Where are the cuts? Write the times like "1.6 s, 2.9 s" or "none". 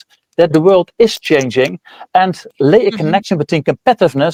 none